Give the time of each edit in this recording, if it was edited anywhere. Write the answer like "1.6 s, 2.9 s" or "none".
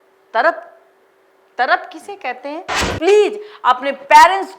2.9 s